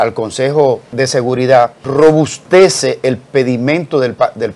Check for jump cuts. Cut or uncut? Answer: cut